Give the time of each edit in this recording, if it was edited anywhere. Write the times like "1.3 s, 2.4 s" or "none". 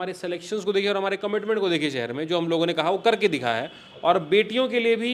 none